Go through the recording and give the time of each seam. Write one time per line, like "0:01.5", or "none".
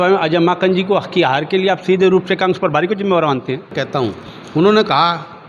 0:03.8